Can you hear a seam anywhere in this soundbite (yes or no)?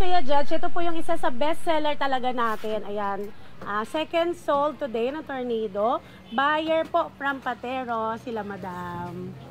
no